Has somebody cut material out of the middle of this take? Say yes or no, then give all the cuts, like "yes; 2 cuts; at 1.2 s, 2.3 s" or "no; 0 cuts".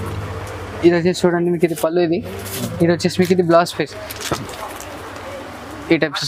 no; 0 cuts